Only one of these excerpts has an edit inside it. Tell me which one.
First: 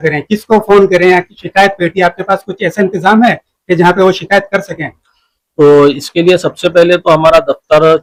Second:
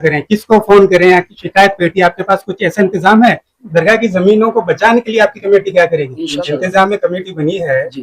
second; 2 cuts; at 3.5 s, 6.2 s

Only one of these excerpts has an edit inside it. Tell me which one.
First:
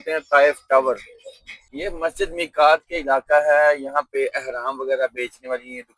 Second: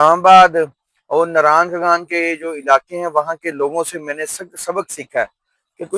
first; 1 cut; at 1.8 s

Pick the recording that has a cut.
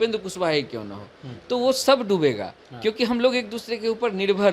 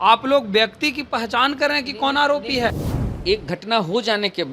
second; 1 cut; at 2.9 s

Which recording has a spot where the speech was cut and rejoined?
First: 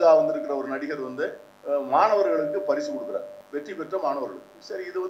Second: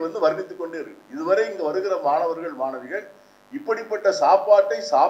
first; 2 cuts; at 1.5 s, 3.4 s

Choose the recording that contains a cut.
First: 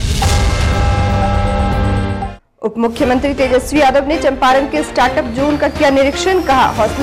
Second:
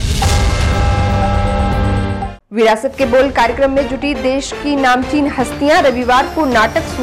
first; 1 cut; at 2.4 s

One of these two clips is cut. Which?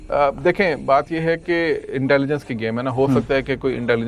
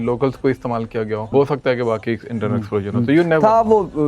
second; 1 cut; at 1.3 s

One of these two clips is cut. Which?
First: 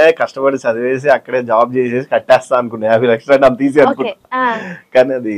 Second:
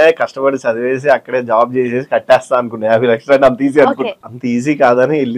second; 1 cut; at 4.2 s

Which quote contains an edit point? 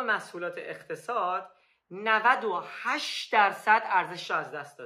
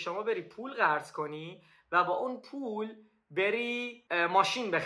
second; 1 cut; at 3.9 s

